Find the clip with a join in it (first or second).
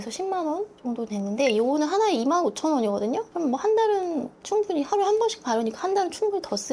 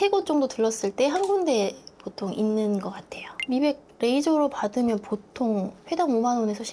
second